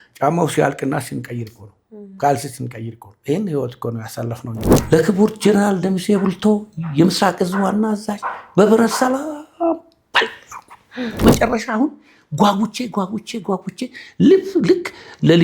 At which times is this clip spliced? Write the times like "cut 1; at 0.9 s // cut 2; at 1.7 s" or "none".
cut 1; at 4.7 s // cut 2; at 11.2 s